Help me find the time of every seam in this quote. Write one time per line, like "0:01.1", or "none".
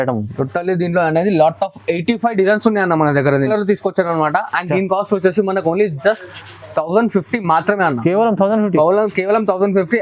0:03.5